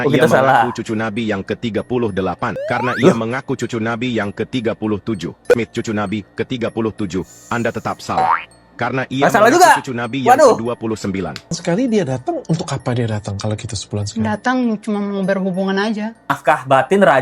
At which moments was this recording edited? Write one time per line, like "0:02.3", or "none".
0:02.5
0:05.5
0:11.6
0:16.4